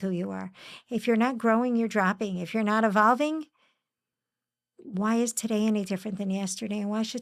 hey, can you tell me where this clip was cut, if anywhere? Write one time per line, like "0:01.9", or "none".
none